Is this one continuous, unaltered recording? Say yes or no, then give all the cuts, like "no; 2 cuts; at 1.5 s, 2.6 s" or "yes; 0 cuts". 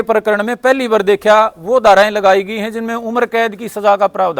yes; 0 cuts